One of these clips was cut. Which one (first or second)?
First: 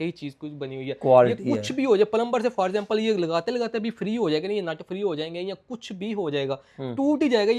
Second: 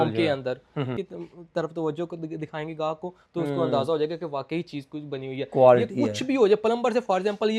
second